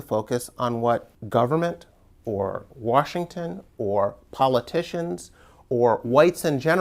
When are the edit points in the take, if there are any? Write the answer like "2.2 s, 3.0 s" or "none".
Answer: 1.2 s